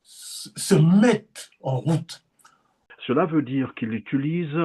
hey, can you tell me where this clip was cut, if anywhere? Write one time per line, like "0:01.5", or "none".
0:02.8